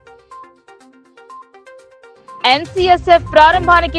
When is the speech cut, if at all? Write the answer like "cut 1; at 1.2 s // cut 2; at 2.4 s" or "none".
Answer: cut 1; at 1.9 s